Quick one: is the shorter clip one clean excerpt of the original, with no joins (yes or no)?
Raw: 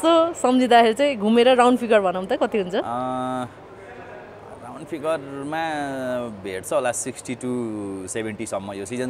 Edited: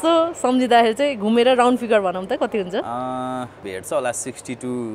no